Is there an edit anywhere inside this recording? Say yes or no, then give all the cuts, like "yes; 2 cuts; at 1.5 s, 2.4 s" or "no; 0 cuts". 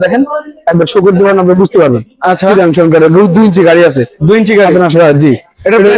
no; 0 cuts